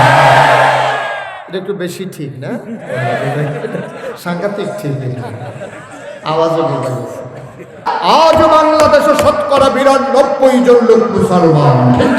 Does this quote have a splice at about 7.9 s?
yes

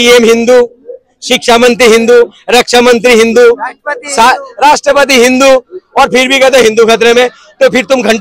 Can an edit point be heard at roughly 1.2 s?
no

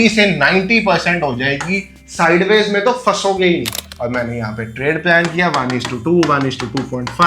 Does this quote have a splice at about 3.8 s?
yes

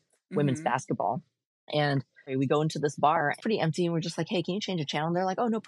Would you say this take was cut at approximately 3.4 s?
yes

